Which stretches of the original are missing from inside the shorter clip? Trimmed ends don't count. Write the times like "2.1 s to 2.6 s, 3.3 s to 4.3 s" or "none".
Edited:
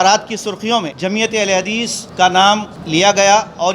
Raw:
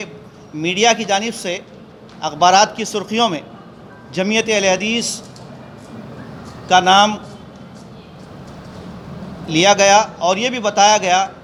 3.4 s to 4.1 s, 5.2 s to 6.5 s, 7.3 s to 9.4 s